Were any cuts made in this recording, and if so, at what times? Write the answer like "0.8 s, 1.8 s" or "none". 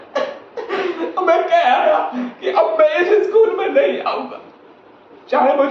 none